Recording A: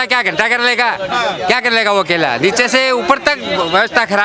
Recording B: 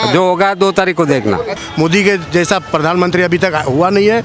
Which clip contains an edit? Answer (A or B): B